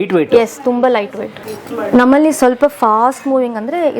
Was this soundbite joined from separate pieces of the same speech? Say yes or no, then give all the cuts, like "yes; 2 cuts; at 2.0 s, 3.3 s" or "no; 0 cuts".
yes; 1 cut; at 1.3 s